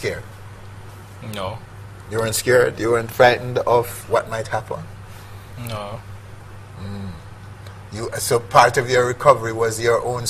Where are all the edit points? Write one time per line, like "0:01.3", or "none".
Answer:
0:00.9